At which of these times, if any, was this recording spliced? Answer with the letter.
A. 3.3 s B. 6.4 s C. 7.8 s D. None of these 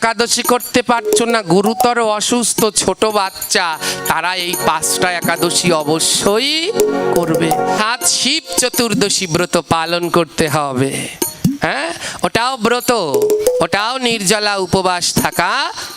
C